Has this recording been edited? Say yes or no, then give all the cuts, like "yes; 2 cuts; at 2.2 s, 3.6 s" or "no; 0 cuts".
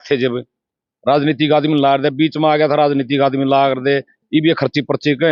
no; 0 cuts